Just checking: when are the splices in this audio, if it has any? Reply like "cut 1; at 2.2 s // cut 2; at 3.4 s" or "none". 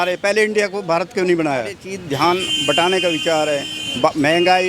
cut 1; at 1.9 s